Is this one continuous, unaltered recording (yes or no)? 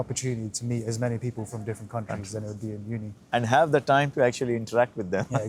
yes